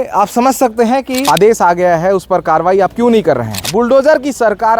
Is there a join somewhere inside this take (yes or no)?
yes